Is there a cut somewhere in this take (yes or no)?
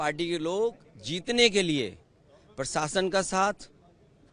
no